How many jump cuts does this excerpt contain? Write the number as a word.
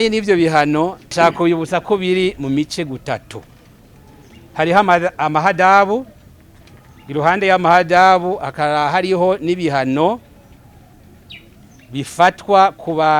one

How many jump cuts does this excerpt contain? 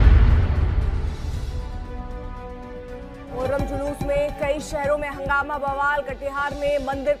one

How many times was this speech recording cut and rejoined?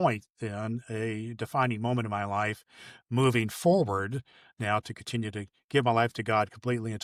zero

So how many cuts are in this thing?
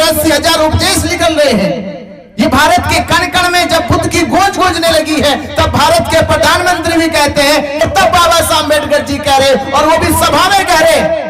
one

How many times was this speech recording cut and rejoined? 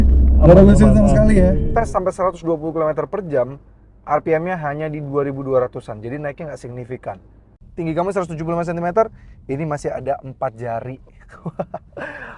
two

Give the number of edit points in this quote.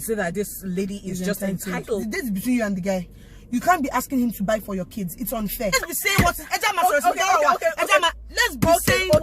two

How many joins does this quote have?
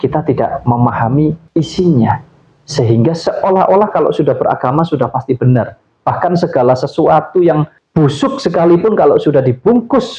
zero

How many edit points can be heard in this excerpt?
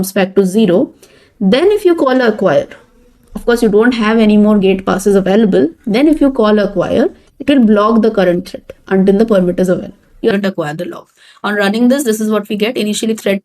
one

